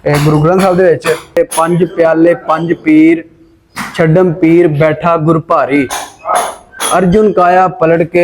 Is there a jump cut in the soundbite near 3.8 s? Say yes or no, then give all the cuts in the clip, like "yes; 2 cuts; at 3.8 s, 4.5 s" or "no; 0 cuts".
no; 1 cut; at 1.4 s